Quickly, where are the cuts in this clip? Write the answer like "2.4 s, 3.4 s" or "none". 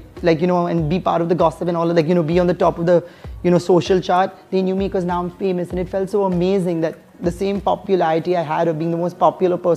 none